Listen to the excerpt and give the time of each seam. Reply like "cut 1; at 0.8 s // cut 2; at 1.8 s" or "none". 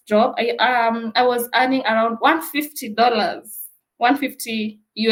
none